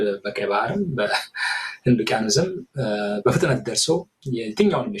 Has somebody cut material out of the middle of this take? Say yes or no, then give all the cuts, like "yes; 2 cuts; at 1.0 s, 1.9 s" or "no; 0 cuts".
no; 0 cuts